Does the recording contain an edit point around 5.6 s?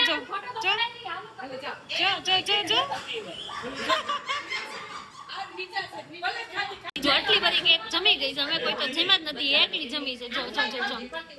no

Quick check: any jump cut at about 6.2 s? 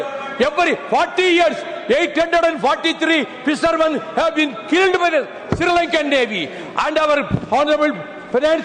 no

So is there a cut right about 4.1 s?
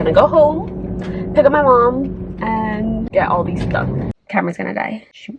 yes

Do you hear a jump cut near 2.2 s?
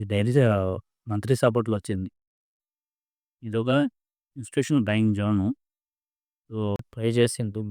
no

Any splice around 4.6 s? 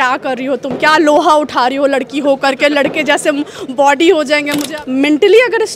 yes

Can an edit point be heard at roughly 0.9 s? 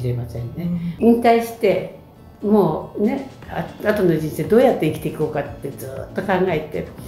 yes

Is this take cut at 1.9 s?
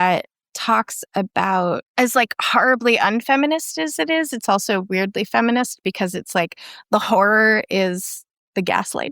yes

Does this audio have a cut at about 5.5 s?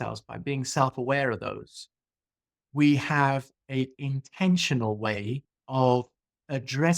yes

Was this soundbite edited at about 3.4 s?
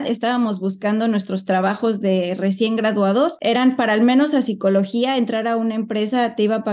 yes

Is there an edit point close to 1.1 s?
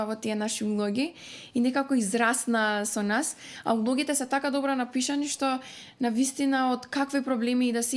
no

